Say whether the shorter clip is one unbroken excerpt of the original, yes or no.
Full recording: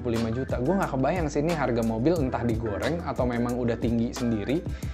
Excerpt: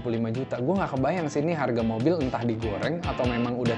yes